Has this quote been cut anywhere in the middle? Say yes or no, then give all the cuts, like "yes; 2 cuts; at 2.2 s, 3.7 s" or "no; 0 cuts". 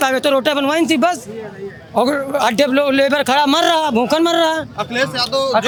no; 0 cuts